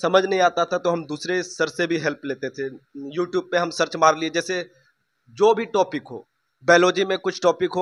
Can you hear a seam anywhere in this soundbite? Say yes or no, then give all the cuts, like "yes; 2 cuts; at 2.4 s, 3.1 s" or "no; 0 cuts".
no; 0 cuts